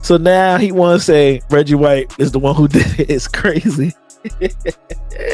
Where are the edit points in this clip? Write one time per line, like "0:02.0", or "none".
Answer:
0:02.1